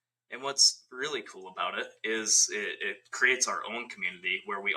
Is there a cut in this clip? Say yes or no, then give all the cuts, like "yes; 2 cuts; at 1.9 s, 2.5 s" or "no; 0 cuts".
no; 0 cuts